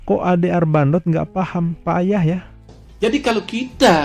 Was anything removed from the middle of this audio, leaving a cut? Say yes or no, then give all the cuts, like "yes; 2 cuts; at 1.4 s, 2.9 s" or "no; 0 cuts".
yes; 1 cut; at 2.9 s